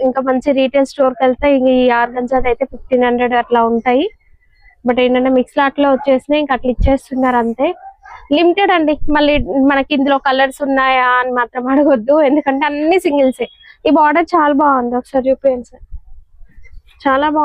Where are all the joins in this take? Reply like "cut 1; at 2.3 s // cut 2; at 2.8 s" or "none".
none